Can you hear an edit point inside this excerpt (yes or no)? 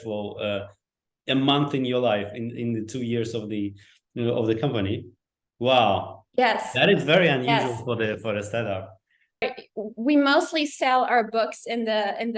yes